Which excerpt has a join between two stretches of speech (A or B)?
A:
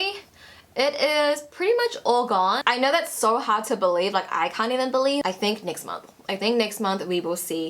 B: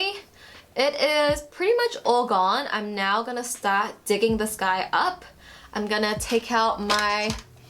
A